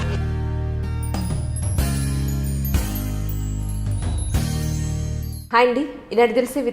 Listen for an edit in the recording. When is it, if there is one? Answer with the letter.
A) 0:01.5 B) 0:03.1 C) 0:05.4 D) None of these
D